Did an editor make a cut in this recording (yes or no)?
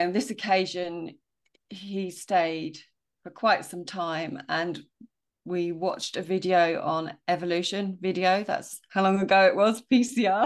no